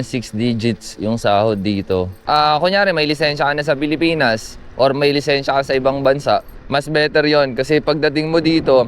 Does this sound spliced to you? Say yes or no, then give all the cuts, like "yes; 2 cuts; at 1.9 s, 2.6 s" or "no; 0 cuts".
yes; 2 cuts; at 2.2 s, 6.6 s